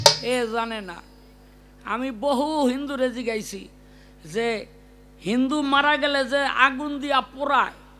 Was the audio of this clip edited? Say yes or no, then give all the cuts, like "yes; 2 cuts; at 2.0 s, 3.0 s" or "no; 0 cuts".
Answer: no; 0 cuts